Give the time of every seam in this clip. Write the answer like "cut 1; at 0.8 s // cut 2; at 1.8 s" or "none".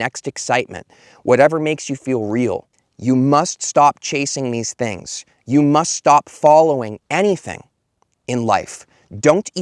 cut 1; at 2.8 s

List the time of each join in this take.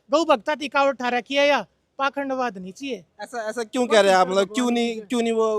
none

